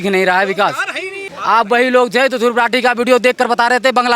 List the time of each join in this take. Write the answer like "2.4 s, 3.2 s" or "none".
1.1 s